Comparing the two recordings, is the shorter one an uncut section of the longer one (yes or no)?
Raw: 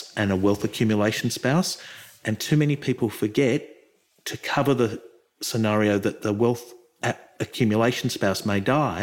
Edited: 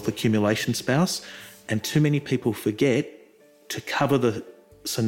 yes